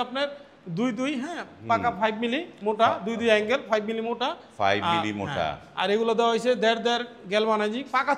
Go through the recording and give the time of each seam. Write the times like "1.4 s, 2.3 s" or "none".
none

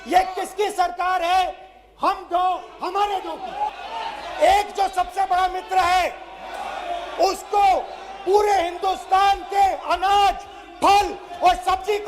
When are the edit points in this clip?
3.7 s

